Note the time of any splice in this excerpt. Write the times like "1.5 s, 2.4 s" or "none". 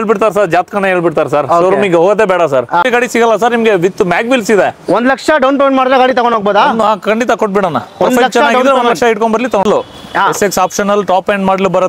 2.8 s, 9.6 s